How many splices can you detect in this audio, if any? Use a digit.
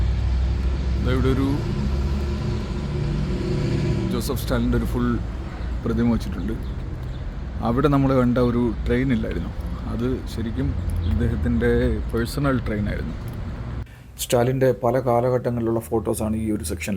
1